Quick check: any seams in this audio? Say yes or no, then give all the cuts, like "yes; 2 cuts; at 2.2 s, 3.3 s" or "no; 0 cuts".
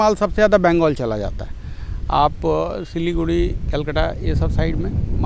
no; 0 cuts